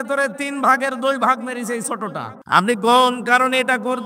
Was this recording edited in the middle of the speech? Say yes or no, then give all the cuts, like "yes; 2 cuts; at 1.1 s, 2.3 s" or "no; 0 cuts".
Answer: yes; 1 cut; at 2.3 s